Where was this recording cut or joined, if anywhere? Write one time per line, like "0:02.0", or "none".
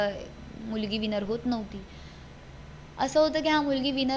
none